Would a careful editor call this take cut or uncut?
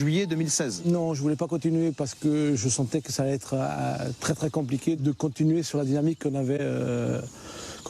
cut